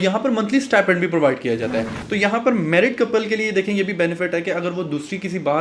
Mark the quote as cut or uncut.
cut